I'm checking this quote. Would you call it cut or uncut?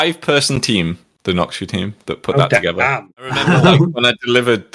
cut